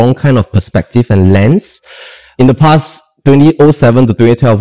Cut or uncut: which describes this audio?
cut